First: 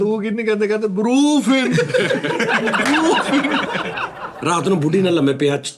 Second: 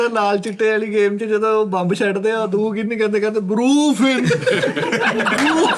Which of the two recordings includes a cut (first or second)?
first